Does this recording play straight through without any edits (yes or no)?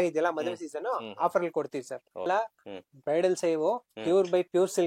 no